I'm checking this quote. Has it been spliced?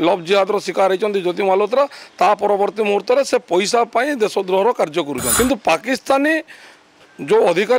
yes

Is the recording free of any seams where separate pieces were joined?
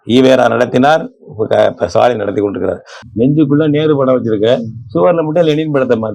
no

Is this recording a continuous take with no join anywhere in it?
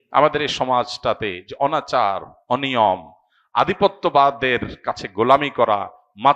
yes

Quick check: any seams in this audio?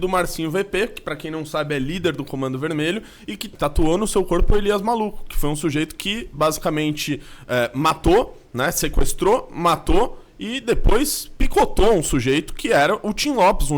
yes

